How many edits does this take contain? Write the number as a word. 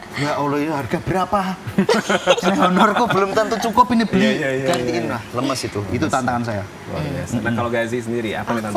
zero